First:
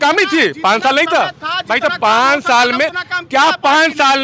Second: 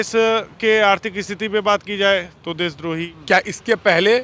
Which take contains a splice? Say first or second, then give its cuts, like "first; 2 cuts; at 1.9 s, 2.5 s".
second; 1 cut; at 3.1 s